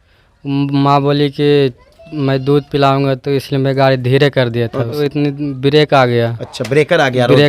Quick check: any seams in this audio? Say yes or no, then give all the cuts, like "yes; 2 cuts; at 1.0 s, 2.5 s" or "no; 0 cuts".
yes; 1 cut; at 4.9 s